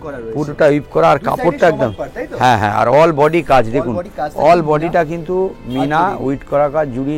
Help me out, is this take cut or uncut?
uncut